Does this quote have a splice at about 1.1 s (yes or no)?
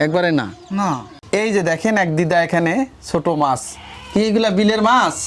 yes